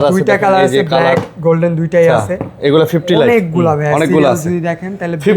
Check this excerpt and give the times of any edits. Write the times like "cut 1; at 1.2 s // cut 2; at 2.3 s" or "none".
none